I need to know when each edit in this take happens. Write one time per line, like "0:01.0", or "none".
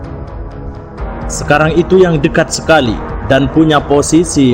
0:01.5